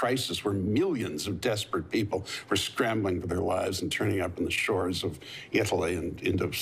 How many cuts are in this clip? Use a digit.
0